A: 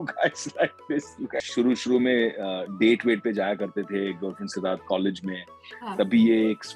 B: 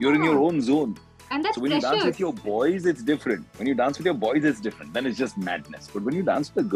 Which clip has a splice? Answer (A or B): A